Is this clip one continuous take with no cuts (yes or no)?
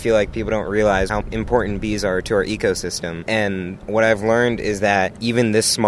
no